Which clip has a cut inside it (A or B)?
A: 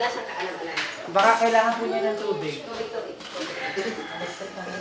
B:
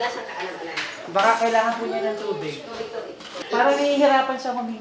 B